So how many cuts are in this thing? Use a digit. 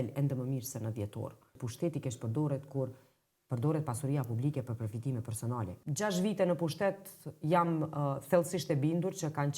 2